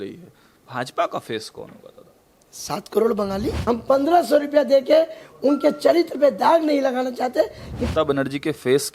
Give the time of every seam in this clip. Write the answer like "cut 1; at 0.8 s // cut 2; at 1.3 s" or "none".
cut 1; at 3.5 s // cut 2; at 7.9 s